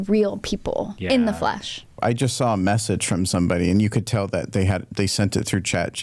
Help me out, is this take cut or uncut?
cut